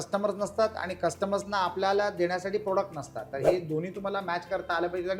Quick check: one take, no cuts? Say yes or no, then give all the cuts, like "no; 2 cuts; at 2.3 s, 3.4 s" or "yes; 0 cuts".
yes; 0 cuts